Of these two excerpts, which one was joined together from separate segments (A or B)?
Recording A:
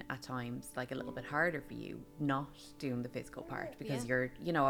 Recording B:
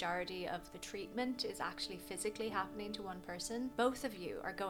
B